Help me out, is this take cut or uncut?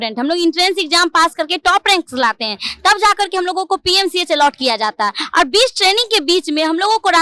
uncut